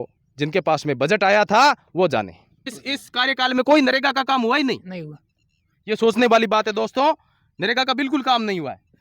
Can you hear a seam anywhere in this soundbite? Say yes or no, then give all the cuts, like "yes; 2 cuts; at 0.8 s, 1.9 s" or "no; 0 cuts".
yes; 1 cut; at 2.8 s